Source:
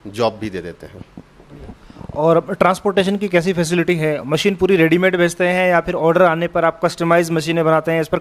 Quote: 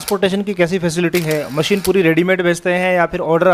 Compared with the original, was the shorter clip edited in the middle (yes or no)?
no